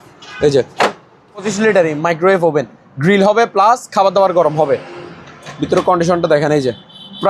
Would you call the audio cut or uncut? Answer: cut